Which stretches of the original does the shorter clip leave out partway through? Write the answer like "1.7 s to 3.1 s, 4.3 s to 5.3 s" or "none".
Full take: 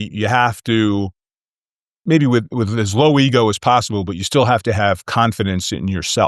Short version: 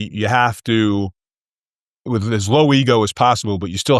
2.0 s to 2.5 s